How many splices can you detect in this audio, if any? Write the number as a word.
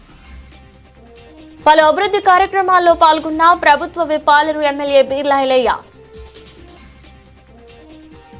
zero